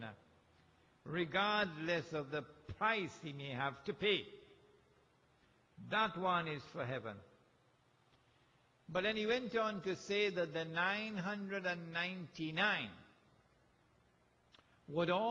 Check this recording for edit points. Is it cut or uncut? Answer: uncut